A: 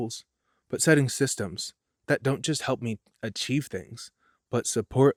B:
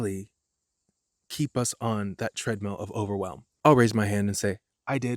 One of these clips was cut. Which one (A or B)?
B